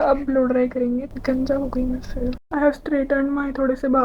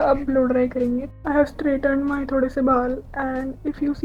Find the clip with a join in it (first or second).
second